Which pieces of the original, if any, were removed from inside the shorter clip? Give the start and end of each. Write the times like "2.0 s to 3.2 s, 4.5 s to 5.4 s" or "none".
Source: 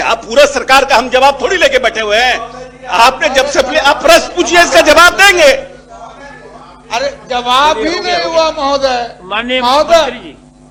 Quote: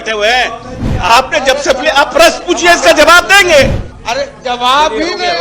5.8 s to 6.7 s